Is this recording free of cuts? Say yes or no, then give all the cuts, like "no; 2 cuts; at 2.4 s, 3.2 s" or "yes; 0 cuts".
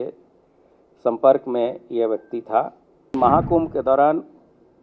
no; 1 cut; at 3.1 s